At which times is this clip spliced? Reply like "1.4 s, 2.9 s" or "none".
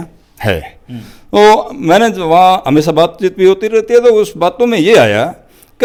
none